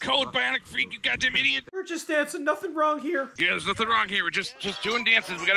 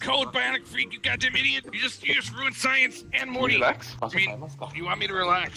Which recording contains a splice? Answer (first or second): first